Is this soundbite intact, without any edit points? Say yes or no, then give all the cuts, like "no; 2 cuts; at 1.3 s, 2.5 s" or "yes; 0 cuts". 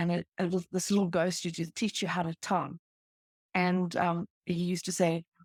yes; 0 cuts